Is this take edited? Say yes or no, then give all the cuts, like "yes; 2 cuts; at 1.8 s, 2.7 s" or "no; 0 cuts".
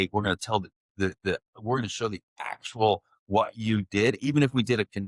no; 0 cuts